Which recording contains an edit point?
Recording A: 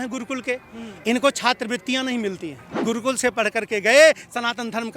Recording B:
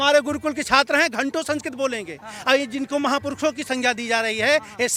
A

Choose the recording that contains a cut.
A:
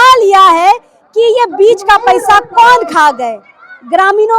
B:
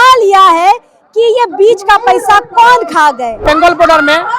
B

